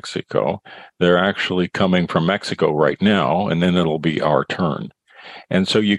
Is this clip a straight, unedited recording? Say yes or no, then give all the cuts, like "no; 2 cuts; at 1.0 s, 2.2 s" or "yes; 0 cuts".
yes; 0 cuts